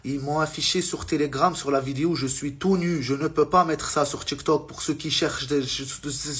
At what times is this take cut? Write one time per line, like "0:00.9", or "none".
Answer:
none